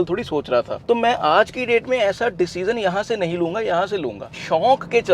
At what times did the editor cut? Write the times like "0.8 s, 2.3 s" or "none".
4.2 s